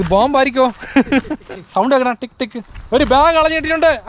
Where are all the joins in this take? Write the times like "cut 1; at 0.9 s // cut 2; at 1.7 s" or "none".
cut 1; at 1.5 s // cut 2; at 2.7 s